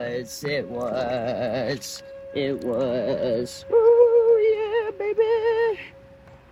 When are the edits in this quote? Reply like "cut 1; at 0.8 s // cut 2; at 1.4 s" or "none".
none